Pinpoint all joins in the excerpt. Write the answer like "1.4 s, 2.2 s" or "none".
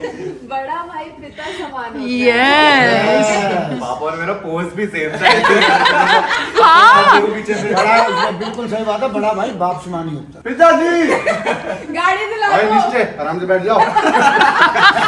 none